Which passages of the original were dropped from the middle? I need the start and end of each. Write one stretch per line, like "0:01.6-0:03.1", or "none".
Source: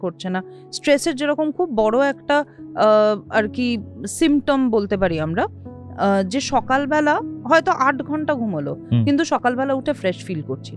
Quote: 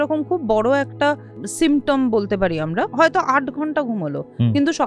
0:02.6-0:03.9
0:05.5-0:07.4